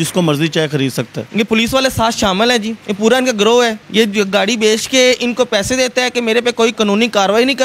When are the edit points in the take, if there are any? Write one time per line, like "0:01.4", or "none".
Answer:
0:01.1
0:02.8
0:03.8
0:06.8